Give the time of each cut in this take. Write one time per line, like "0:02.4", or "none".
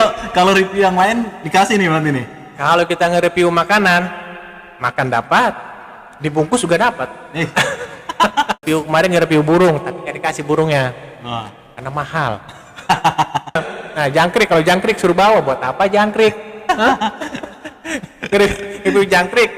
0:08.6
0:13.7

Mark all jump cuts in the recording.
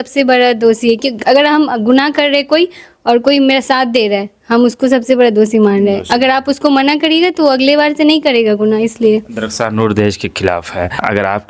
none

